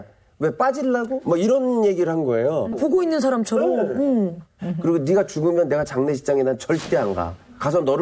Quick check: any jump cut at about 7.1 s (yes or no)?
no